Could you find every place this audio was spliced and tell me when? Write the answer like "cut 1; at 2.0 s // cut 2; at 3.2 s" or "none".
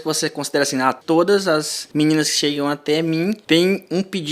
cut 1; at 1.0 s // cut 2; at 1.8 s // cut 3; at 3.4 s